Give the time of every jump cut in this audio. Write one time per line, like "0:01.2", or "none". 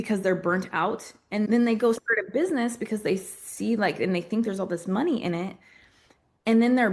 0:01.5